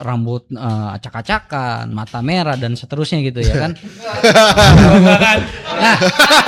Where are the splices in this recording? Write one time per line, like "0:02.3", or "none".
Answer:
none